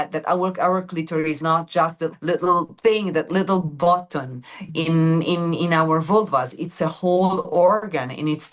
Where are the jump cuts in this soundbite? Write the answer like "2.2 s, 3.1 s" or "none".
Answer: 2.7 s